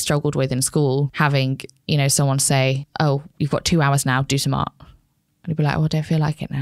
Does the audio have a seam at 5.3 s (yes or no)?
no